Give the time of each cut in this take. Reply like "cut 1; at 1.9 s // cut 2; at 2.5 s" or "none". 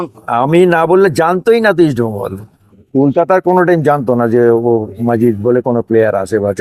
cut 1; at 2.8 s